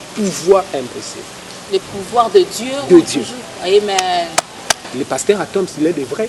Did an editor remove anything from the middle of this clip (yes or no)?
yes